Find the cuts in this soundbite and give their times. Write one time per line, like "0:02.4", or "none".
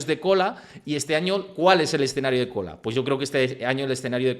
none